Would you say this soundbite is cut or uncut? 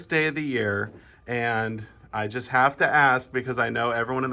uncut